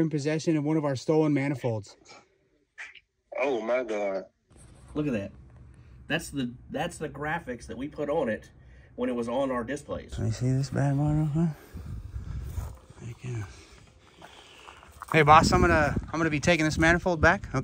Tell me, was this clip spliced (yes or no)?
yes